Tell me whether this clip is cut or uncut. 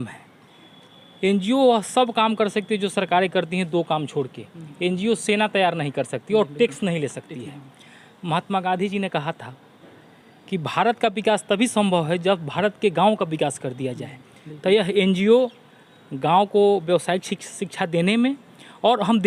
uncut